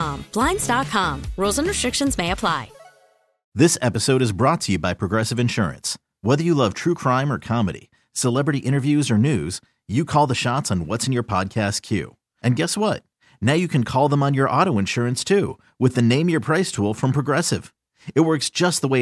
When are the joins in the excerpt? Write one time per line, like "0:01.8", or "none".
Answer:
0:03.4